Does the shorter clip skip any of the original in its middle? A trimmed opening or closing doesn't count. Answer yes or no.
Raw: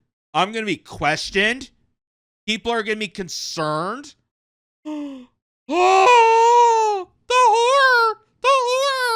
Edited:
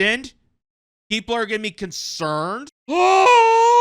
yes